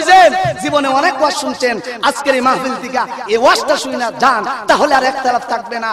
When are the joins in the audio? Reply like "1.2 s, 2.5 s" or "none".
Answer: none